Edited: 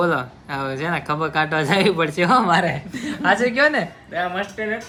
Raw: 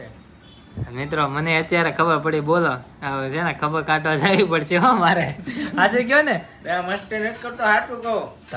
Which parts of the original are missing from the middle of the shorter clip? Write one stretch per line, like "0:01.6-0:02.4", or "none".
none